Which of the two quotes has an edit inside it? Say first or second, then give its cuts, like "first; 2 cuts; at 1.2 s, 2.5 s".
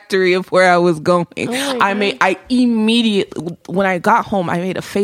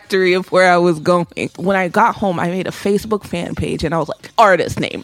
second; 2 cuts; at 1.4 s, 4.2 s